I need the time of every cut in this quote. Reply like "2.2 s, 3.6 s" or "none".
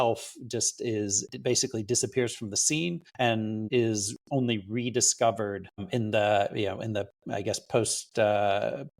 1.2 s, 3.4 s, 5.8 s